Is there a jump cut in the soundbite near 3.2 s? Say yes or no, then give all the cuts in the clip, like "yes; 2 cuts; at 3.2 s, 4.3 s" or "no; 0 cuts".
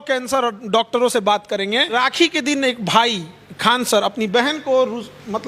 no; 1 cut; at 1.9 s